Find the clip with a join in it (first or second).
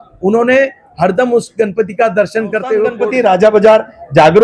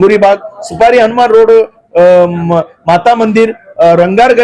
first